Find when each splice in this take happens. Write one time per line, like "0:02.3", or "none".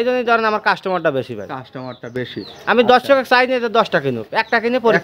none